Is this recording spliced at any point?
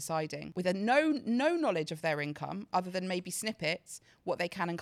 no; 0 cuts

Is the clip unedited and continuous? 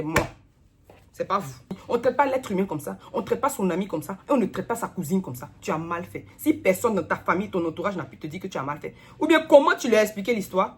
no; 1 cut; at 1.7 s

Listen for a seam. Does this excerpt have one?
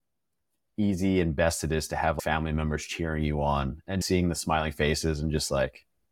yes; 2 cuts; at 2.2 s, 4.0 s

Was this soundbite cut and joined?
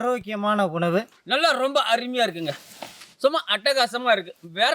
yes; 1 cut; at 1.2 s

